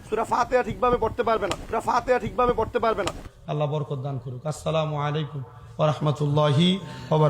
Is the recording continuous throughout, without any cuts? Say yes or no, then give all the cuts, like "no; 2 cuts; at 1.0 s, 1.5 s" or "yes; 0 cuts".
no; 1 cut; at 3.2 s